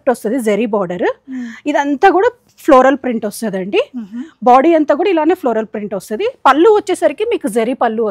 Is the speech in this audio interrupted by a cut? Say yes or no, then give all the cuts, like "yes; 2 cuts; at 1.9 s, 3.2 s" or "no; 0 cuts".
no; 0 cuts